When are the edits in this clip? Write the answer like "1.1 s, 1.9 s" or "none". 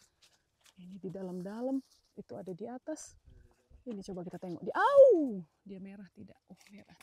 none